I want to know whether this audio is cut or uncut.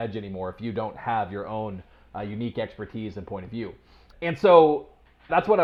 uncut